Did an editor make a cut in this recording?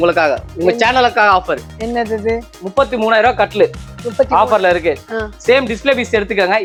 no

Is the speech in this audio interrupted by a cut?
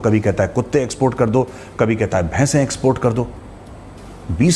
no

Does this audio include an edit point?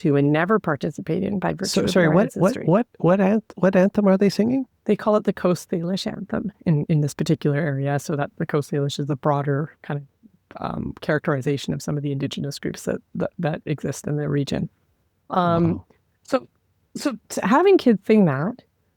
no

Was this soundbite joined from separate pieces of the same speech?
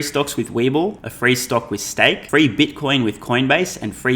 yes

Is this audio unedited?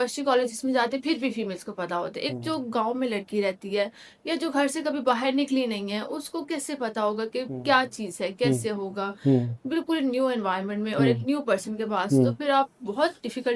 yes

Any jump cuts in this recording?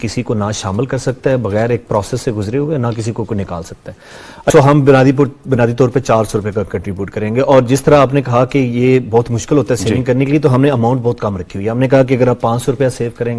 yes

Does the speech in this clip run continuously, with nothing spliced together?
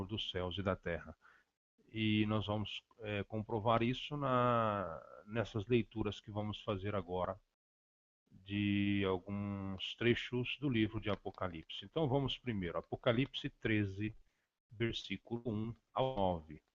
no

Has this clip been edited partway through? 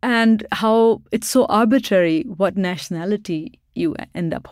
no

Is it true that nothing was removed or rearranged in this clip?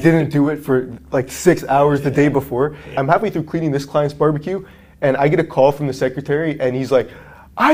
no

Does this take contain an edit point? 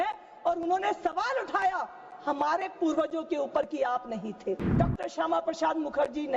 yes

